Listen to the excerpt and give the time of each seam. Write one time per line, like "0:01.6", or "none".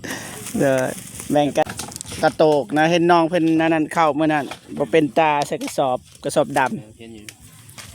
0:01.7